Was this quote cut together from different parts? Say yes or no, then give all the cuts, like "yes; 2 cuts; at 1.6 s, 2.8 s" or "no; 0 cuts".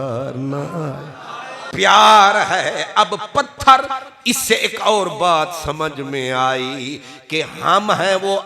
yes; 1 cut; at 1.6 s